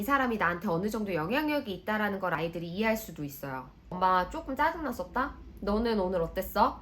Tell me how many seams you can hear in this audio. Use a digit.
1